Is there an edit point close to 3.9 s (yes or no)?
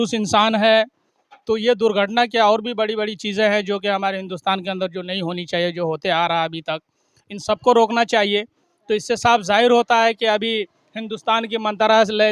no